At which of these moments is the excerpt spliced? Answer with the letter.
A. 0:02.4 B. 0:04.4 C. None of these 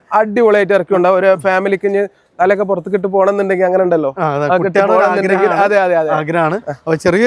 C